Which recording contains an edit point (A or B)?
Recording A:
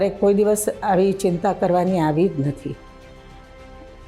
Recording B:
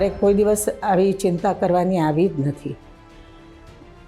B